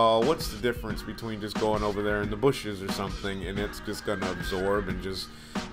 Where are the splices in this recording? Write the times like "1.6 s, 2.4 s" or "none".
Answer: 2.4 s